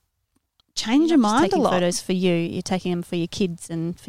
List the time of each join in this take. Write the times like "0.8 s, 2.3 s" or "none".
1.7 s